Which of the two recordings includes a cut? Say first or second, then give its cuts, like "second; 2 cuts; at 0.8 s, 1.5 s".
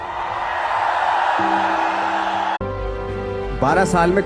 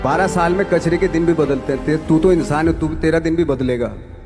first; 1 cut; at 2.6 s